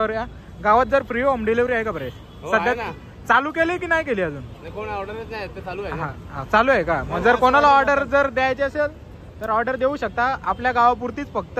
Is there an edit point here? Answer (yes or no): no